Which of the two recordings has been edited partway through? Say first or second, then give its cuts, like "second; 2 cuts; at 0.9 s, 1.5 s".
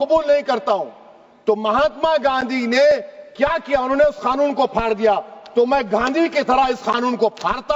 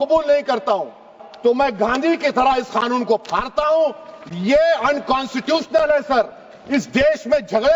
second; 1 cut; at 1.2 s